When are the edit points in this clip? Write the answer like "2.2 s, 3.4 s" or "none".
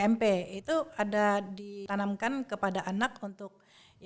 1.8 s